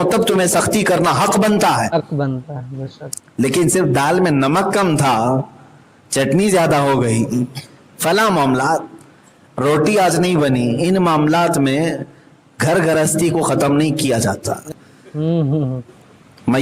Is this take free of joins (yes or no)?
no